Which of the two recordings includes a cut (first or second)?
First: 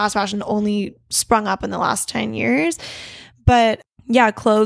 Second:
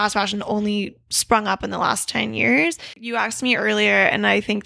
second